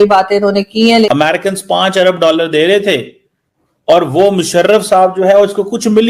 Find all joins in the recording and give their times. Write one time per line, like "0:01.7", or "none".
0:01.1